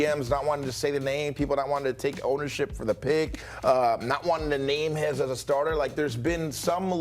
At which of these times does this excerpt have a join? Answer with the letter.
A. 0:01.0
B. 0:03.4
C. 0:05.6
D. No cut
B